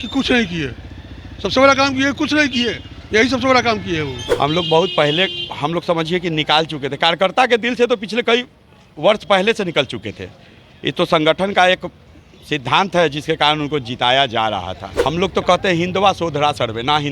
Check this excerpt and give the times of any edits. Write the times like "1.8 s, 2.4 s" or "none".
4.2 s, 14.8 s